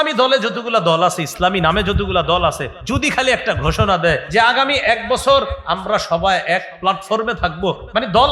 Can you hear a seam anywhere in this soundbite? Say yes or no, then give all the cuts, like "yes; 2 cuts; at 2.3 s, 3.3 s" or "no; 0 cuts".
yes; 2 cuts; at 2.7 s, 4.2 s